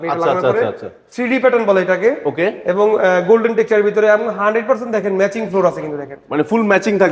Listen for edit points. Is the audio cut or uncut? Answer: uncut